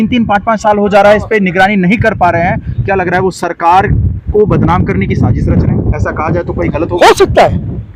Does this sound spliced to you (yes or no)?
no